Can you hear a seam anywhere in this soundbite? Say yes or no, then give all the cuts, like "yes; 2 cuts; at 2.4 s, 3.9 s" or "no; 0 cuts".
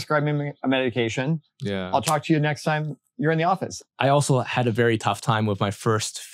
yes; 1 cut; at 3.7 s